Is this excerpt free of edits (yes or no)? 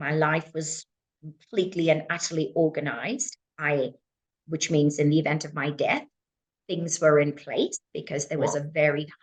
yes